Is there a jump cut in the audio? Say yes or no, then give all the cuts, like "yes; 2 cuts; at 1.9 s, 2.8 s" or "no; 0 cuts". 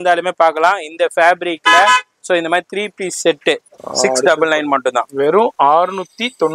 yes; 1 cut; at 3.8 s